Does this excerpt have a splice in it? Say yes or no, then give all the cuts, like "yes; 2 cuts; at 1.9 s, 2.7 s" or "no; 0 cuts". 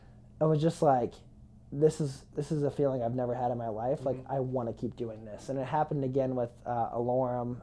no; 0 cuts